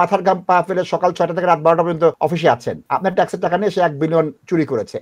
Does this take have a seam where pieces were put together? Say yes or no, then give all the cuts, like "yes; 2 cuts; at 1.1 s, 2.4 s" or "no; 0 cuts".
yes; 1 cut; at 2.3 s